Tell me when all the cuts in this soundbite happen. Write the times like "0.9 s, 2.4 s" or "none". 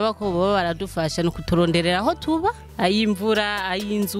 2.7 s

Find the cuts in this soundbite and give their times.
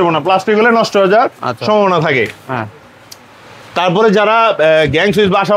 none

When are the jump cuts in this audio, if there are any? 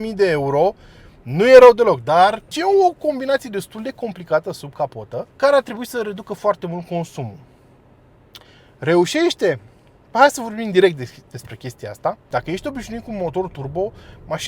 2.5 s, 5.3 s, 12.3 s

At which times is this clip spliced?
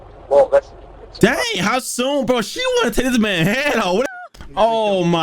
4.1 s

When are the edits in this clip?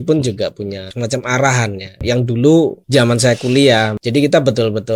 0.9 s, 2.0 s, 2.8 s, 4.0 s

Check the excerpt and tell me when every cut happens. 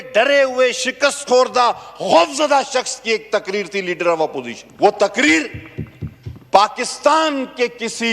4.6 s

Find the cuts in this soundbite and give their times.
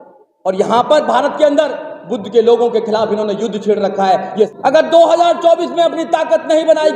4.5 s

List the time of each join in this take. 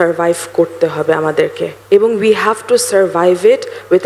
none

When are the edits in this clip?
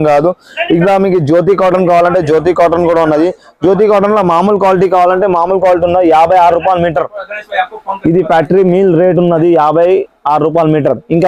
none

